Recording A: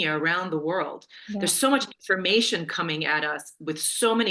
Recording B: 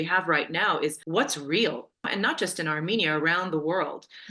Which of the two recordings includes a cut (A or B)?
B